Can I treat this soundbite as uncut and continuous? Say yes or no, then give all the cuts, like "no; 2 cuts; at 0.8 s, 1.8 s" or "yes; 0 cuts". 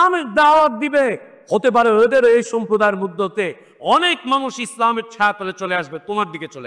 no; 1 cut; at 1.3 s